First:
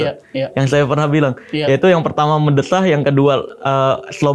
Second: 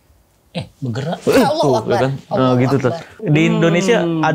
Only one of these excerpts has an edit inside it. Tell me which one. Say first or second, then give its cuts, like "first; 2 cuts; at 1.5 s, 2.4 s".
second; 1 cut; at 3.2 s